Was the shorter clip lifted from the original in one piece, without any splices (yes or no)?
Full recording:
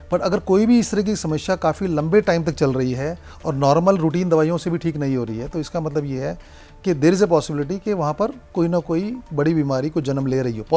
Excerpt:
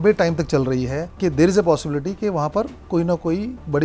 no